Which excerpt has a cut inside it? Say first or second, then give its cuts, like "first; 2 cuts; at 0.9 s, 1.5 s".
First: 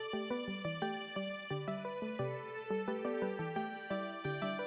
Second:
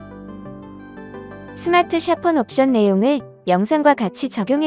second; 1 cut; at 1.6 s